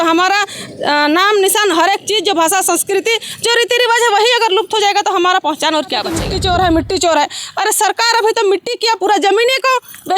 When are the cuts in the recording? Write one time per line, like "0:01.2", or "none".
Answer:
0:06.3